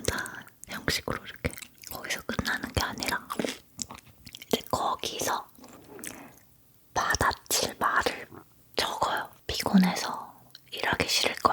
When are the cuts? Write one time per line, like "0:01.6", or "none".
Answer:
0:01.6
0:09.4

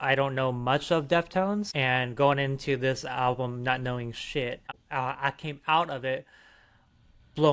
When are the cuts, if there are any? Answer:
0:01.7
0:04.7

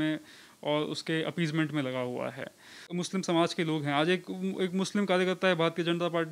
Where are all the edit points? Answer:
0:02.9

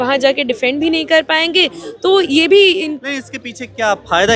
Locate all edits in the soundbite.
none

